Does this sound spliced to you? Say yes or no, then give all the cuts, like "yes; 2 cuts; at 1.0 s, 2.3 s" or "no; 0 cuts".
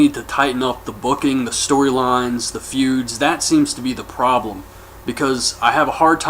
yes; 1 cut; at 1.6 s